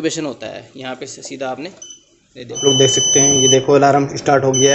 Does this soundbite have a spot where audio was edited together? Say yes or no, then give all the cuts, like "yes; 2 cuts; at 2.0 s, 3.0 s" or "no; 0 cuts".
yes; 1 cut; at 2.6 s